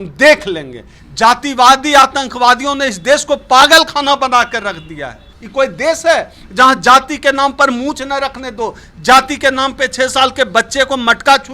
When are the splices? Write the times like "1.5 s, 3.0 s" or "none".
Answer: 1.0 s, 5.4 s